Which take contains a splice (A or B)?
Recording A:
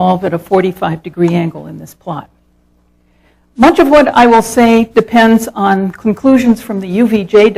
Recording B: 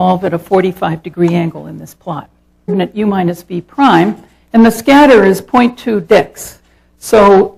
A